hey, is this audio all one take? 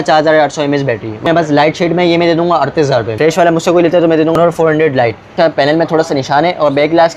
no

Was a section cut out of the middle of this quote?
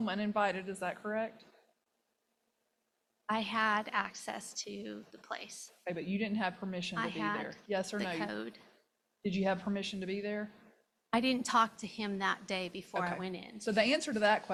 no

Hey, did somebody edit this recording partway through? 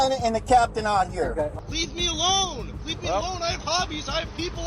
yes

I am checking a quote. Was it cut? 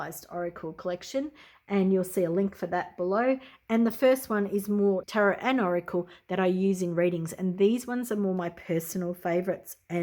yes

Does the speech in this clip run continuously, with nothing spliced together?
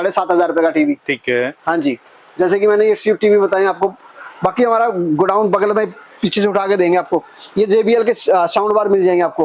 yes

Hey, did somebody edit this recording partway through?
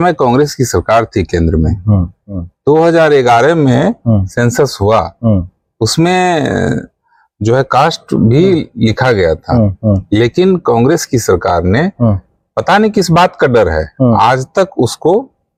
no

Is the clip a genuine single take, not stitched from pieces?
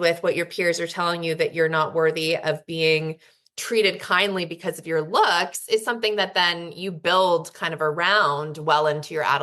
yes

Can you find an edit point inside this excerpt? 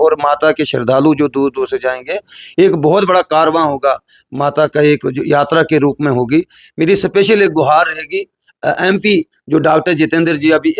yes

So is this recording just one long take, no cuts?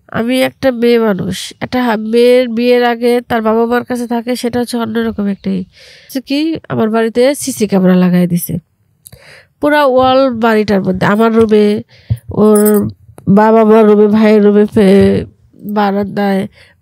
no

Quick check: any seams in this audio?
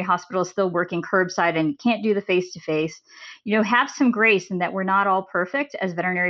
no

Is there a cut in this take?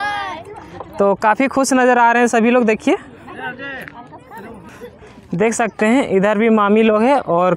no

